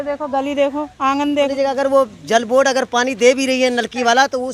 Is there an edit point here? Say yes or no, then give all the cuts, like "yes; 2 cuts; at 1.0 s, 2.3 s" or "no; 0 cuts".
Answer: yes; 1 cut; at 1.5 s